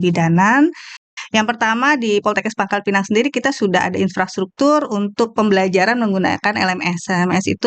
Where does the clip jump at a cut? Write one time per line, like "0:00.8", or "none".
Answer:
0:01.0